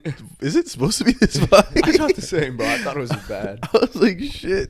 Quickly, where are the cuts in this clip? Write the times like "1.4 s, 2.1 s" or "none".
none